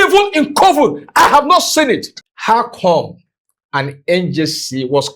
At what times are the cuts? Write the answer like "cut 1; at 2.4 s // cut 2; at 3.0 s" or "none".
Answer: cut 1; at 2.1 s